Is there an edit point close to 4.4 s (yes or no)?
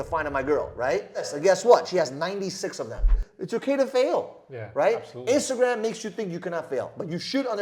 no